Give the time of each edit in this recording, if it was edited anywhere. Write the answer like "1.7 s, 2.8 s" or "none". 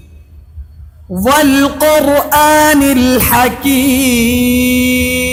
none